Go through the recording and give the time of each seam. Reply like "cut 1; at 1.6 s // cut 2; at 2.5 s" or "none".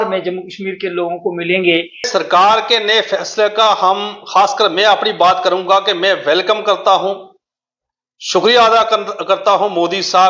cut 1; at 2.1 s